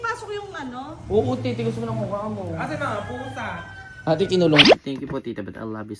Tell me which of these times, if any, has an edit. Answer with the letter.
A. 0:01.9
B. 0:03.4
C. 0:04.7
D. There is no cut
C